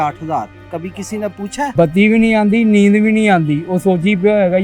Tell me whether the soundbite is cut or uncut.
cut